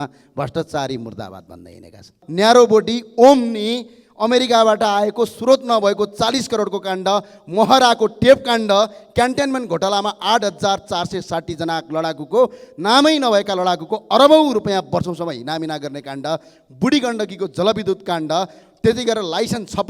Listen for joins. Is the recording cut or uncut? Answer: cut